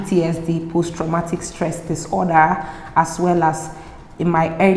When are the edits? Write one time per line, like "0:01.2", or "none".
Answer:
none